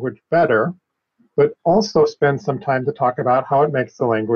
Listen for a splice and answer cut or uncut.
uncut